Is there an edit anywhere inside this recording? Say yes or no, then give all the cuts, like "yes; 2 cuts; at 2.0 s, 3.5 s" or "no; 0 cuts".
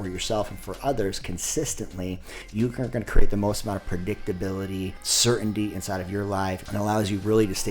yes; 3 cuts; at 2.3 s, 5.1 s, 6.6 s